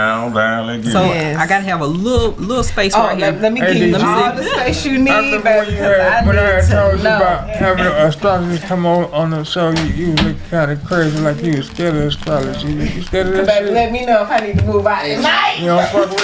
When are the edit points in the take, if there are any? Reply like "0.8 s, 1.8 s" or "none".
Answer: 0.9 s